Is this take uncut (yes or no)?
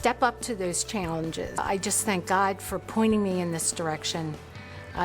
no